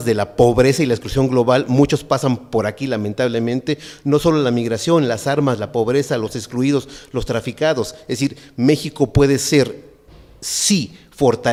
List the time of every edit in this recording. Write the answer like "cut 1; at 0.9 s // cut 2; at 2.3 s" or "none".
none